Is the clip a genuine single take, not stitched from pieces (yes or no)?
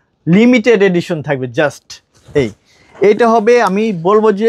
yes